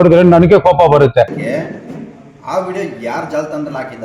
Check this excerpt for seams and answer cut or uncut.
cut